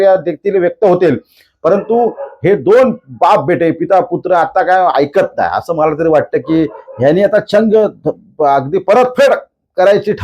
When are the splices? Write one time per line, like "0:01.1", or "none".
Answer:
0:05.9